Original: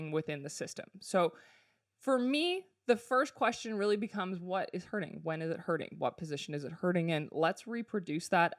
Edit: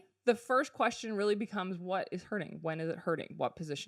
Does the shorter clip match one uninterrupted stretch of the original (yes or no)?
yes